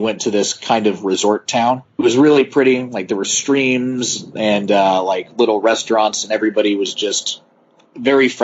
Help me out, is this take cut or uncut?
cut